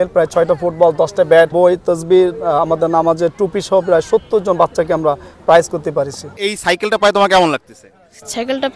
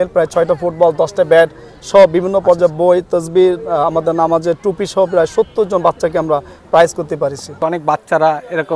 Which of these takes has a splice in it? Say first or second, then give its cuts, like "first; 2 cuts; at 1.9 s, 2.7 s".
first; 2 cuts; at 1.5 s, 6.3 s